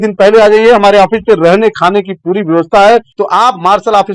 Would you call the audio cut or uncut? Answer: cut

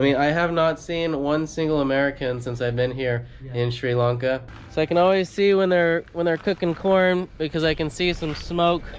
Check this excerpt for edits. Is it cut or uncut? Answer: cut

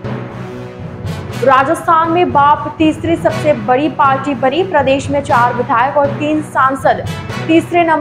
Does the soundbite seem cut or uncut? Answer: cut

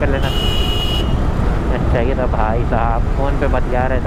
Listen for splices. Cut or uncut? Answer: uncut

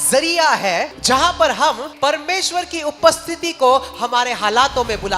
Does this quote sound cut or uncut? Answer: cut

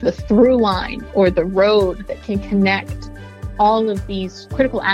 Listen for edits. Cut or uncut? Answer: uncut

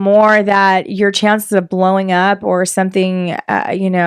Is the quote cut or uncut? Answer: uncut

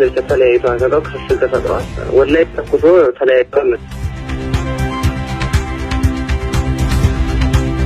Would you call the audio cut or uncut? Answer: cut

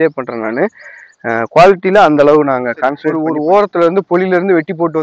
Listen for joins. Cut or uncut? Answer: cut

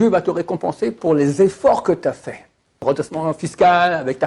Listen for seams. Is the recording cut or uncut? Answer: cut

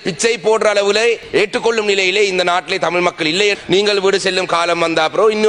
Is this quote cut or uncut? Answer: cut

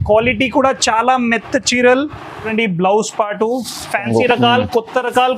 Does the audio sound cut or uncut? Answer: cut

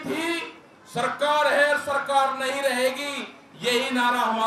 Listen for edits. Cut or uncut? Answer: uncut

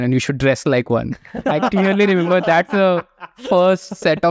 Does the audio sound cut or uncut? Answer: uncut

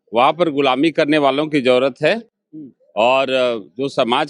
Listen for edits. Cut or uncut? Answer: uncut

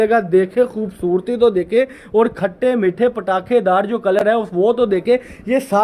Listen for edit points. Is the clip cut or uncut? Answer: uncut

